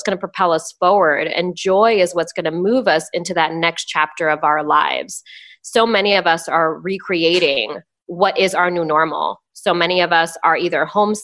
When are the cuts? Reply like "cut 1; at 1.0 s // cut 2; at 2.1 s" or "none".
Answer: none